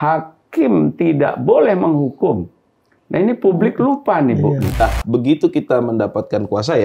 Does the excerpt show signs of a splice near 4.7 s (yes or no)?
yes